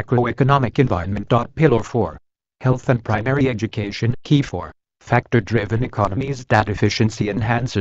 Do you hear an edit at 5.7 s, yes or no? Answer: no